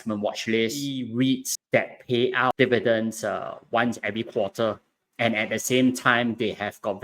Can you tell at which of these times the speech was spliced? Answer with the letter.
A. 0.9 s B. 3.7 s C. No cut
A